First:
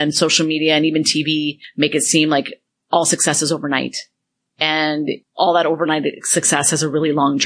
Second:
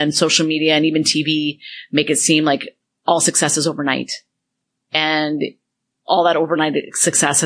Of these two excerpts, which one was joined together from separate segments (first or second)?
first